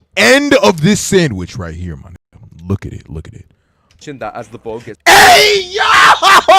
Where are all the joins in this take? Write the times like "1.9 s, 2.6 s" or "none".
none